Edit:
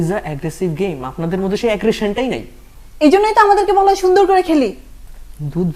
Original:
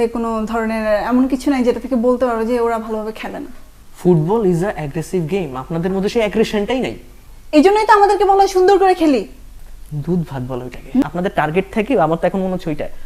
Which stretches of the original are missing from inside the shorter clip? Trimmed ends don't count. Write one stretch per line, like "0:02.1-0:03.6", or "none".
none